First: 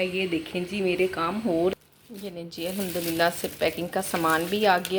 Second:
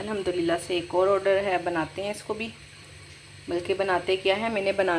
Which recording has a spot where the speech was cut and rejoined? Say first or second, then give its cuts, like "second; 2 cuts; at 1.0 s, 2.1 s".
first; 1 cut; at 1.7 s